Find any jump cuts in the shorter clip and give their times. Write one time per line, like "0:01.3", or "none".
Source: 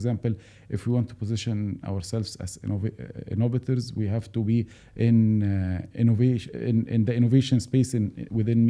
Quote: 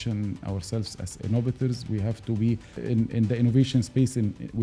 0:01.0
0:02.7